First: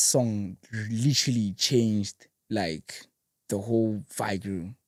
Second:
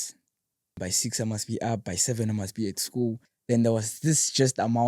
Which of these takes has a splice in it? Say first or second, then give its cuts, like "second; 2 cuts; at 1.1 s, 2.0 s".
second; 2 cuts; at 0.8 s, 3.3 s